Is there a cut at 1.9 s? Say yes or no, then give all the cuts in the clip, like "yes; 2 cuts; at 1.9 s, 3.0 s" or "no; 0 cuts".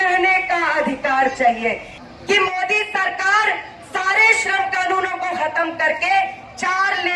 yes; 1 cut; at 1.9 s